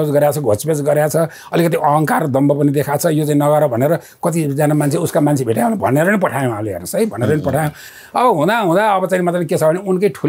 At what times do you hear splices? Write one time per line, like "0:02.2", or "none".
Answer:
none